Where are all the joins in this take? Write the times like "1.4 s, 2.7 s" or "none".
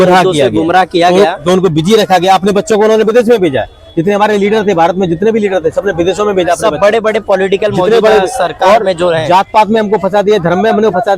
none